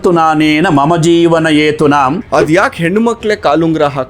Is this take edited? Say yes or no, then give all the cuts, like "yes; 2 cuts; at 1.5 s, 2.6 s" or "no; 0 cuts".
yes; 1 cut; at 2.2 s